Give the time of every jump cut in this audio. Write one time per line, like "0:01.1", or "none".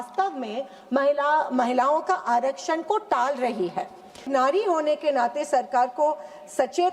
0:04.2